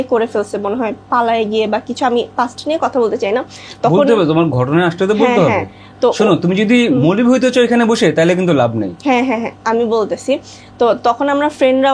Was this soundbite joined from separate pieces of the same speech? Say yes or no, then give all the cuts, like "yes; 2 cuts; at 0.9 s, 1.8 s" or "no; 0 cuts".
no; 0 cuts